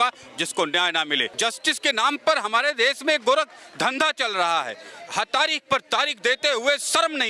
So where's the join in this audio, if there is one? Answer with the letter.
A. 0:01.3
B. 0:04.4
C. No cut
A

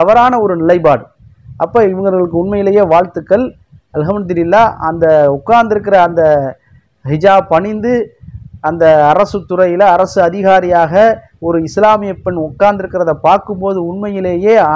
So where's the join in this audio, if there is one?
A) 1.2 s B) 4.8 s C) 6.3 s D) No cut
D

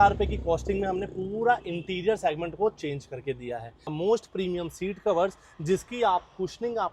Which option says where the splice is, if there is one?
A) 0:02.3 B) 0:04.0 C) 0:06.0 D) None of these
B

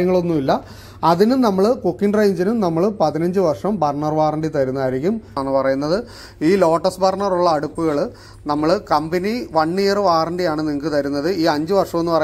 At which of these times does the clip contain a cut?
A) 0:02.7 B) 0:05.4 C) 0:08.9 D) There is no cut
B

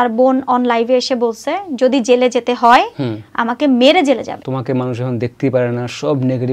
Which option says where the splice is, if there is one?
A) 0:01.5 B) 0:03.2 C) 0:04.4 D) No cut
C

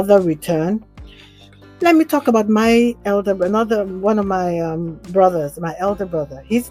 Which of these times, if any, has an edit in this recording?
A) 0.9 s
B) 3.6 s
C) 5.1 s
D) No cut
D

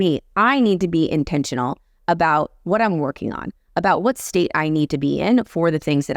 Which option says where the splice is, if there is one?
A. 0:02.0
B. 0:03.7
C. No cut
C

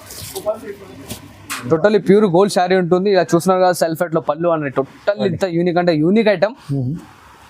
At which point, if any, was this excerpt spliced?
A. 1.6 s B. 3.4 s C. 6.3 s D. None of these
A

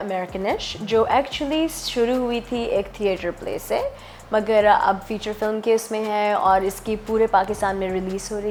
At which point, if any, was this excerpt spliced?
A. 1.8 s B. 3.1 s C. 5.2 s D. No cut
D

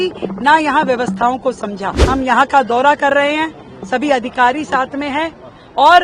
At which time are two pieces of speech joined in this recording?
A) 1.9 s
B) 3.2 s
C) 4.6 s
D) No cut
A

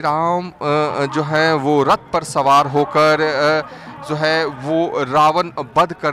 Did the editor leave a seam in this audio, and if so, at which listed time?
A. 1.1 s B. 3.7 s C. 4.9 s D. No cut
D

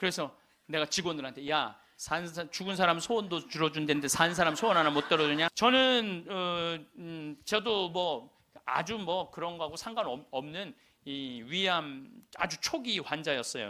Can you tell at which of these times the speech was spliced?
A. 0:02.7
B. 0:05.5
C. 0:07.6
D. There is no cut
B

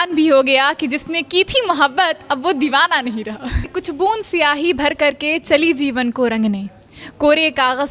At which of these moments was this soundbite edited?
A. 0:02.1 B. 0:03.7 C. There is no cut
B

